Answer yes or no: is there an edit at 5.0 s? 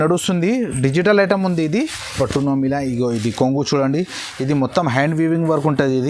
no